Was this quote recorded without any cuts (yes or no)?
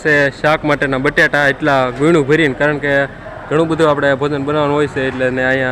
yes